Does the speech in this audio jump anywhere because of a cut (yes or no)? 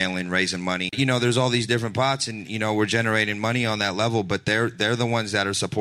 yes